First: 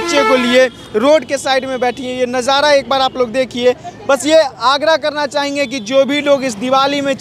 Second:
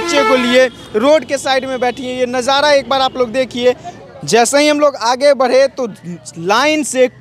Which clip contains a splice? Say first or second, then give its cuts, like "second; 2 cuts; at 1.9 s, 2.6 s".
second; 1 cut; at 4.0 s